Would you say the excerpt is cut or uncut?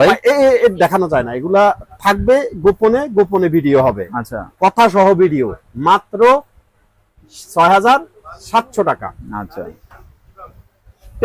uncut